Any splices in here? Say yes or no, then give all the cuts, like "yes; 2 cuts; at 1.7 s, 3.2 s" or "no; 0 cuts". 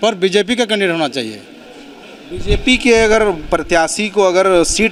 no; 0 cuts